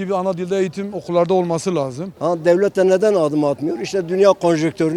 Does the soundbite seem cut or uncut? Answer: cut